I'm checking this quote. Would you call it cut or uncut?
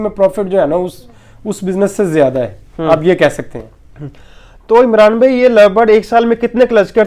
uncut